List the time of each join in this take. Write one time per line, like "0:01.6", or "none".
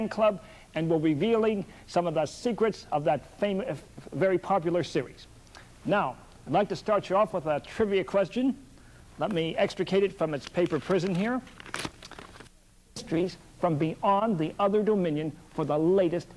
none